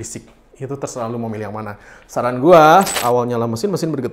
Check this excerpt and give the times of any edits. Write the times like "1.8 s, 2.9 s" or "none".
3.0 s